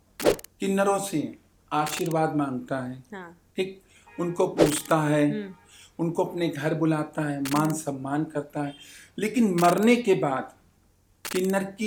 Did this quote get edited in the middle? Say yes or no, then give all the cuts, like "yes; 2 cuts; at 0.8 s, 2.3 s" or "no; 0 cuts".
no; 0 cuts